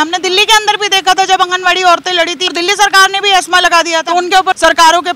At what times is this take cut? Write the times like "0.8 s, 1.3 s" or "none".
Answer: 2.5 s, 4.4 s